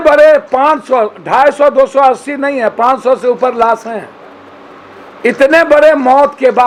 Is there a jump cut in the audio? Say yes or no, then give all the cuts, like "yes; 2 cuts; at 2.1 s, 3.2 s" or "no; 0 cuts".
no; 0 cuts